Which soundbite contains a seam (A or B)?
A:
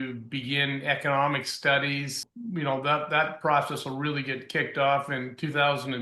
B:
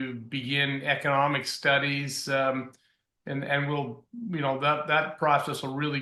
A